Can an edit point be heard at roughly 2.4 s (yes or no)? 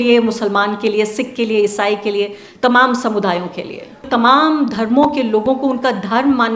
no